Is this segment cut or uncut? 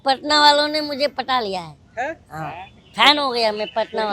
cut